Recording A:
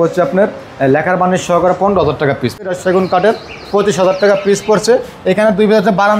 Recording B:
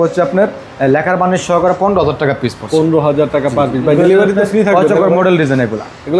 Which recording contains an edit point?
A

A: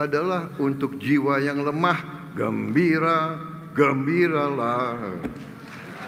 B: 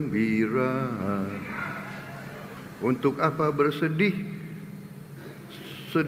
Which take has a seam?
B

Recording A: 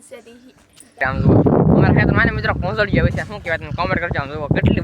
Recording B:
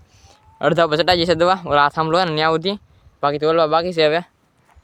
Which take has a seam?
A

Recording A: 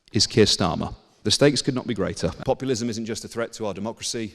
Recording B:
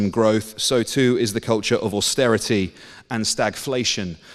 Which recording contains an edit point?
A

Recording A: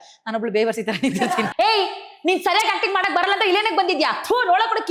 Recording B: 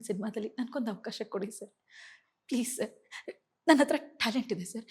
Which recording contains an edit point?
A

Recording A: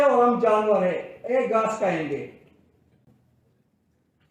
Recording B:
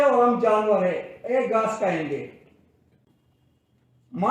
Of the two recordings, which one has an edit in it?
B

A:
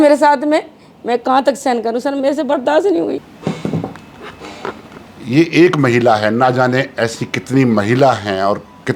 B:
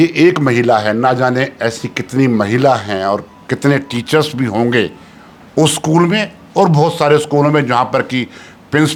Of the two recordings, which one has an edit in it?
A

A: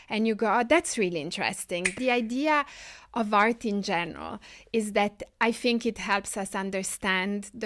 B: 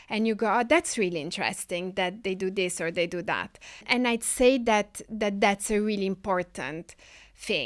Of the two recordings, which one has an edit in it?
A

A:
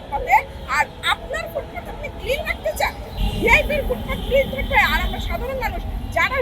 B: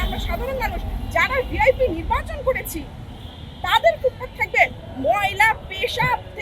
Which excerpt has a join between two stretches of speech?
A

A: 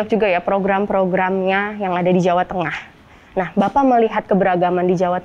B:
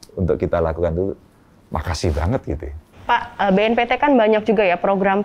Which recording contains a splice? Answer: B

